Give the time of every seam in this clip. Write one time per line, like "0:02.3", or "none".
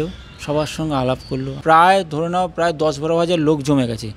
0:01.6